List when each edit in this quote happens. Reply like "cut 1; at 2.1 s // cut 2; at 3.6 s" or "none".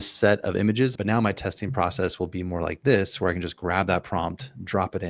cut 1; at 0.9 s